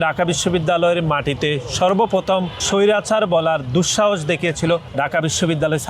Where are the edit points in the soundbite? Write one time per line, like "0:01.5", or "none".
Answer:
0:02.6
0:04.9